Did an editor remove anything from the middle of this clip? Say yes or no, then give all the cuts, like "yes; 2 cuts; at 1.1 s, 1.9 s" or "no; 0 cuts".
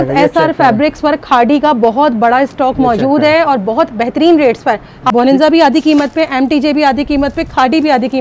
yes; 1 cut; at 5.0 s